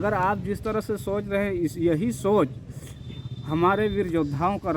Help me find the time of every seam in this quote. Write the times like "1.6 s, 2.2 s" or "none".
none